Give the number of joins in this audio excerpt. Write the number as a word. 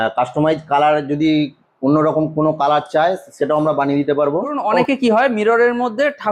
one